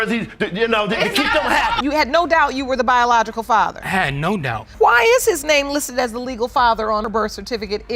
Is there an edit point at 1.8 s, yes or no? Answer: yes